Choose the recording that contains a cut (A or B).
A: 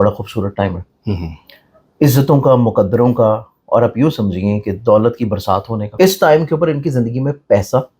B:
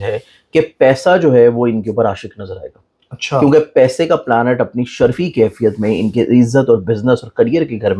A